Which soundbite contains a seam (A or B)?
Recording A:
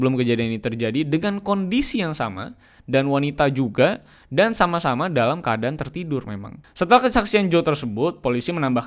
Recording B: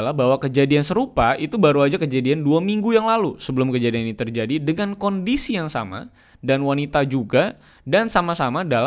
A